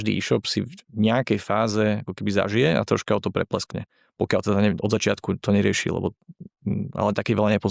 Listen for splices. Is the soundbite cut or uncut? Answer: uncut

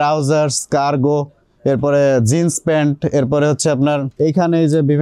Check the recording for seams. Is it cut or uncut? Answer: cut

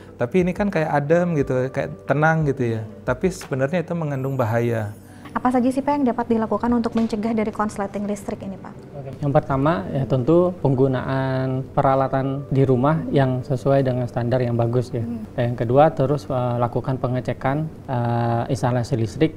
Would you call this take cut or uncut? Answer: cut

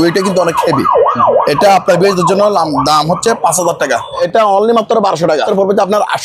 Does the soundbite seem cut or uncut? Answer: cut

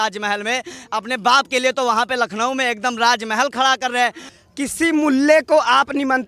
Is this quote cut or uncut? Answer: cut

